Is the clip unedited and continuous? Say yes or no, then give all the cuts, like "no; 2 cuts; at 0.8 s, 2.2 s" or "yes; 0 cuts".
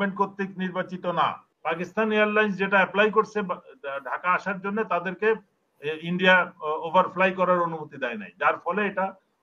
no; 1 cut; at 1.5 s